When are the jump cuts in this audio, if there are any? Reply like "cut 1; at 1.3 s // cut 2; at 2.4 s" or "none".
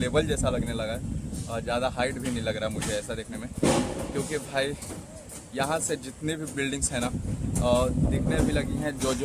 none